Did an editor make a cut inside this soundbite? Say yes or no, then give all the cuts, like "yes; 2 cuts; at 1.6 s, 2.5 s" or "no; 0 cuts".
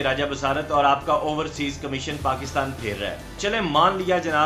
yes; 1 cut; at 3.3 s